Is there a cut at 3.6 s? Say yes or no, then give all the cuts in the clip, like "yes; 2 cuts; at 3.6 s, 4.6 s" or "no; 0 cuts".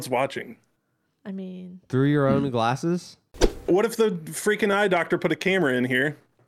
yes; 1 cut; at 3.6 s